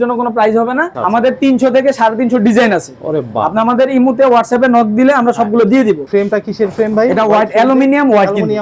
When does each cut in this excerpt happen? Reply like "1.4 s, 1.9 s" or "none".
1.2 s, 6.0 s